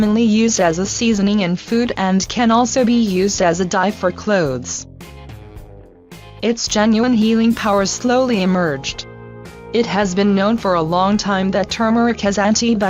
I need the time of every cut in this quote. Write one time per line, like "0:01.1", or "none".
0:01.9